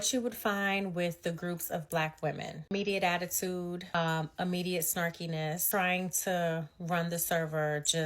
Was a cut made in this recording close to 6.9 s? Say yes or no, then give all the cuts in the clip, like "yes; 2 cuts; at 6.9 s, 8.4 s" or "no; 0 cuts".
no; 3 cuts; at 2.7 s, 3.9 s, 5.6 s